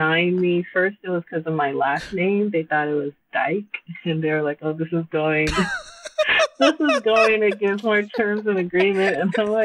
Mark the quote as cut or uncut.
uncut